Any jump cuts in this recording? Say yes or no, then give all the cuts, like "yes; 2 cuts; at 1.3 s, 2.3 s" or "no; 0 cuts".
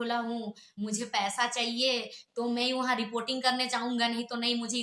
no; 0 cuts